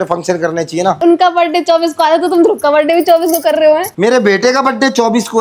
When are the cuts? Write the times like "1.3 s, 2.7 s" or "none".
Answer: 1.0 s, 3.9 s